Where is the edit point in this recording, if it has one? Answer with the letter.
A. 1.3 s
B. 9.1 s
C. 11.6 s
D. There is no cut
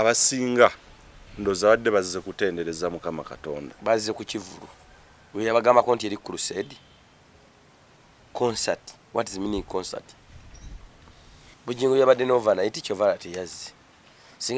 C